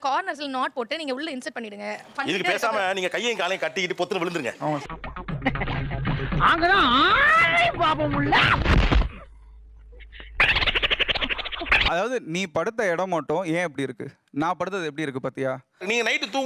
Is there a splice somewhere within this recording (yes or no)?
no